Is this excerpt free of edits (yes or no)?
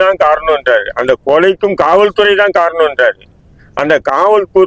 yes